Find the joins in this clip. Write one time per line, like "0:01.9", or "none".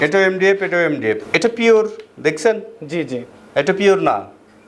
0:01.2